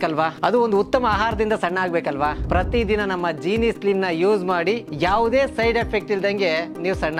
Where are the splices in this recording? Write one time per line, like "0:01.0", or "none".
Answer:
none